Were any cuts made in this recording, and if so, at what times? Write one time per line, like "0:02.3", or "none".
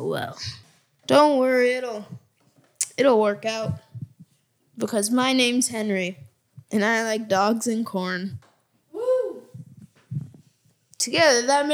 none